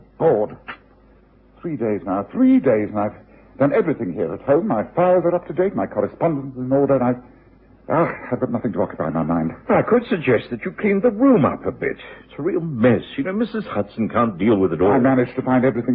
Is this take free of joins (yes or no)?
yes